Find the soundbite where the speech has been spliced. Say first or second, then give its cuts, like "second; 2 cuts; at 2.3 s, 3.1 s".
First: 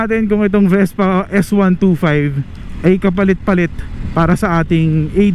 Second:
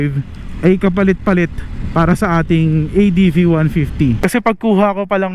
second; 1 cut; at 4.2 s